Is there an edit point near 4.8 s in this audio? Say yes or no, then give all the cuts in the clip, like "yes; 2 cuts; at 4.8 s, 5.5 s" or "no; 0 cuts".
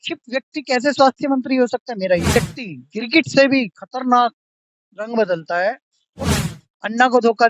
no; 2 cuts; at 2.4 s, 6.3 s